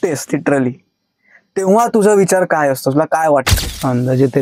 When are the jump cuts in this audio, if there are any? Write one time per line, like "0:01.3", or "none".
0:03.5